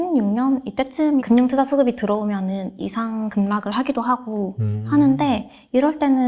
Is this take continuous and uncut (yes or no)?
no